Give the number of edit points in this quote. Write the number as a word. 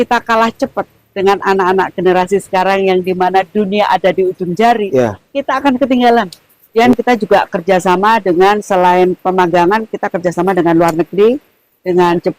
one